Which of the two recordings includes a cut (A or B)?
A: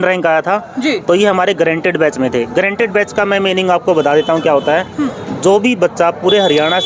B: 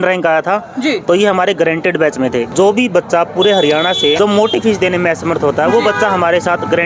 B